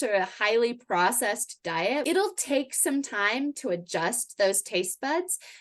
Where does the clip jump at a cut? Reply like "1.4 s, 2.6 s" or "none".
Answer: 2.0 s